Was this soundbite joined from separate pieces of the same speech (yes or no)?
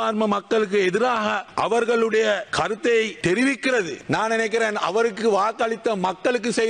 yes